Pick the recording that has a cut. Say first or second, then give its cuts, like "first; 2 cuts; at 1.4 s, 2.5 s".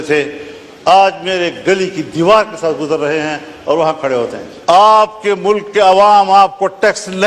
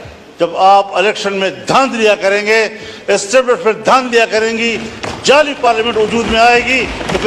first; 1 cut; at 4.5 s